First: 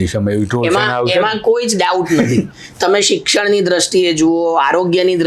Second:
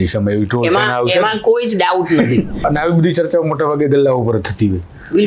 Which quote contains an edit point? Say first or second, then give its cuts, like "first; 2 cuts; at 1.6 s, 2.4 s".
second; 1 cut; at 2.6 s